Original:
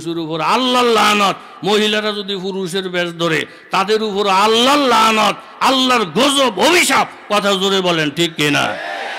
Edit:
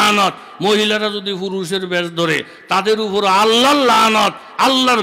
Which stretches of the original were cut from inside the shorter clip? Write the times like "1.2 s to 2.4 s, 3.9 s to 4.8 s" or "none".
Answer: none